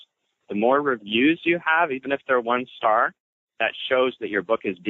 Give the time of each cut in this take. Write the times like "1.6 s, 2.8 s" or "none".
none